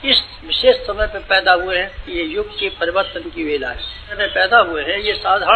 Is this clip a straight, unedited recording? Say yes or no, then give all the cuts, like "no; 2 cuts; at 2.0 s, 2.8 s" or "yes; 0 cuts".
no; 1 cut; at 4.2 s